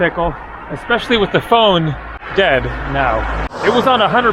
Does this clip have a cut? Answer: yes; 2 cuts; at 2.1 s, 3.5 s

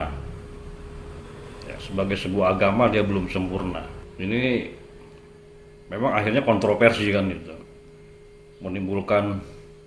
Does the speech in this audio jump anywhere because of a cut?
yes; 1 cut; at 4.0 s

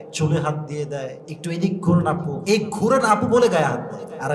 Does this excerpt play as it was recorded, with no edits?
no; 2 cuts; at 1.3 s, 2.3 s

